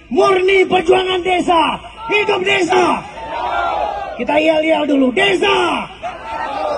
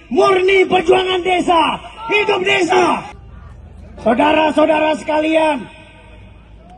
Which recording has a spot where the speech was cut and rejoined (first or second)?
second